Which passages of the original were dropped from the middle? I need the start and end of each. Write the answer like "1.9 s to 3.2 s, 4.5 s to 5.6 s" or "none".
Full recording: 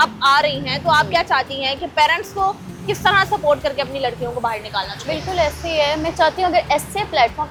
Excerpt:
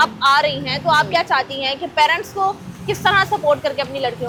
none